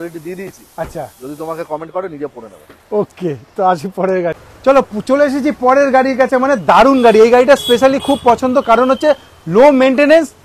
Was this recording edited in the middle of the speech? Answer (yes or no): no